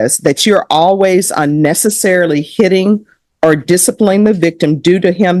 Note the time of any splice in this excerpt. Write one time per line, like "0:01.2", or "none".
none